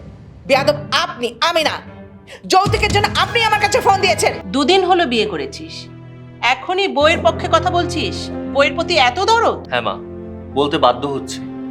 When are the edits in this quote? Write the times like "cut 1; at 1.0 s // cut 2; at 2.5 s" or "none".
cut 1; at 4.4 s // cut 2; at 9.6 s